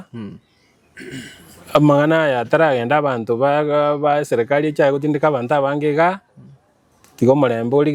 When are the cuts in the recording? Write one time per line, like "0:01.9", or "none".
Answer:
none